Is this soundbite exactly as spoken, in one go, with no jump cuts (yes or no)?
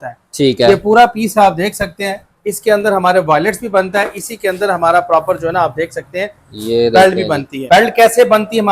no